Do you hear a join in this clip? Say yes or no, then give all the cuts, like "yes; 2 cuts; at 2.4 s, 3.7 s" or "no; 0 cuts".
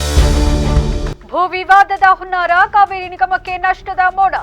yes; 1 cut; at 1.1 s